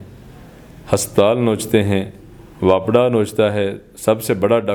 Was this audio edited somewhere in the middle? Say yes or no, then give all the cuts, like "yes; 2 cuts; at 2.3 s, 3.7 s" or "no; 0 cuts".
no; 0 cuts